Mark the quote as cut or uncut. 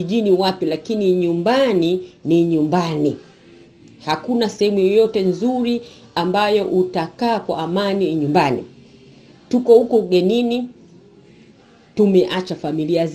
uncut